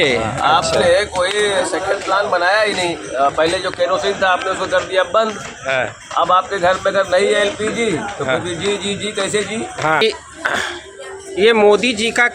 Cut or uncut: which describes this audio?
cut